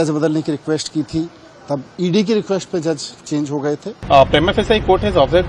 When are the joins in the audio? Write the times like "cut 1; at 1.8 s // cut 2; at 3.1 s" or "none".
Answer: cut 1; at 3.9 s